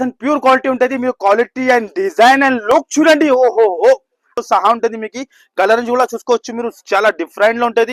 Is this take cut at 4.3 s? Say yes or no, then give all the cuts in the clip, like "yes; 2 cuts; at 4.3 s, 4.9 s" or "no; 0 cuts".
yes; 1 cut; at 4.3 s